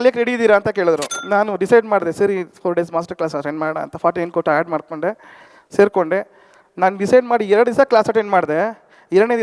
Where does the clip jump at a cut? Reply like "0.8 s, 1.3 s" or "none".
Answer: 1.1 s